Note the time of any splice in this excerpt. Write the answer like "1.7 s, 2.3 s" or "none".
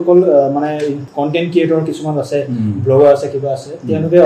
1.1 s